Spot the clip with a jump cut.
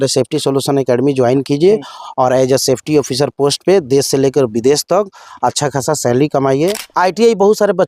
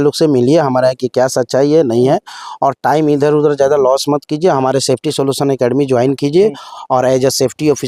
first; 1 cut; at 6.8 s

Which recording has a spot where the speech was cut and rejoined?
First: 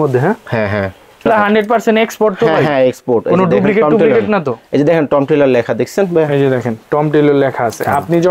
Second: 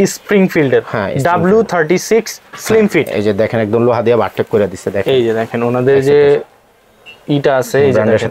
first; 1 cut; at 1.3 s

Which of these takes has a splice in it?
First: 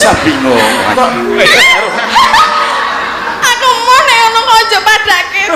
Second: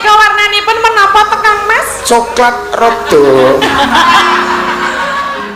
first; 1 cut; at 0.9 s

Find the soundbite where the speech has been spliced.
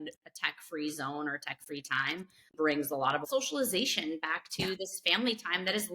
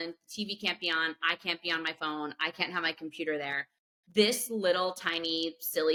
first; 2 cuts; at 2.5 s, 3.2 s

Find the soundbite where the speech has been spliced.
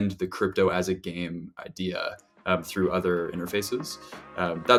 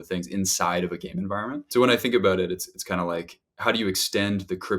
second; 1 cut; at 1.6 s

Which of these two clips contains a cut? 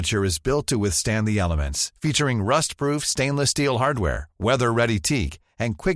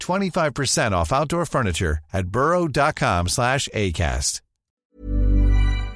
second; 1 cut; at 4.9 s

